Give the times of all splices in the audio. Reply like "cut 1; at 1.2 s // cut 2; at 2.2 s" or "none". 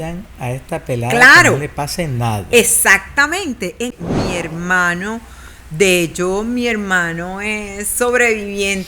cut 1; at 3.9 s